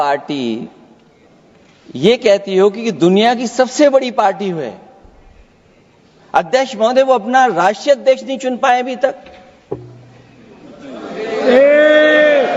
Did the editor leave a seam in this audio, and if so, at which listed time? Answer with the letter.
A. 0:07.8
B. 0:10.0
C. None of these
C